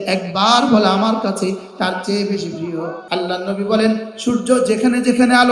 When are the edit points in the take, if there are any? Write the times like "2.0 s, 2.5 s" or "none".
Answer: 3.0 s